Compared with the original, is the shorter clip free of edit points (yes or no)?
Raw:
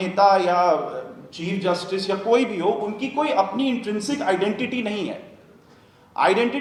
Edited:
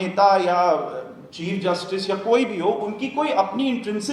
yes